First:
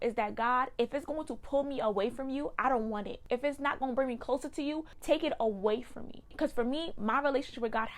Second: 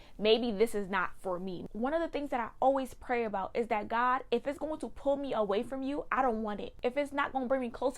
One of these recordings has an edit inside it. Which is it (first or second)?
second